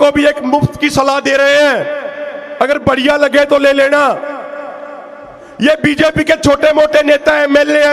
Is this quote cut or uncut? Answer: uncut